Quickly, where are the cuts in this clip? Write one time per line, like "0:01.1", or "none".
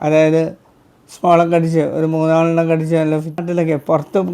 0:03.4